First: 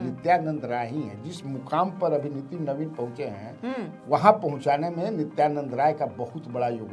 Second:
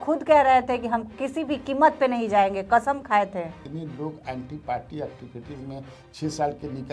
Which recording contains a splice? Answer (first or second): second